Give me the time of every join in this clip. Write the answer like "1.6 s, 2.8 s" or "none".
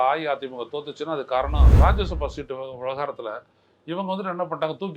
1.7 s